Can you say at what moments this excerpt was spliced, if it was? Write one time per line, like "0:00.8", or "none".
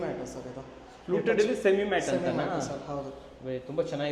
none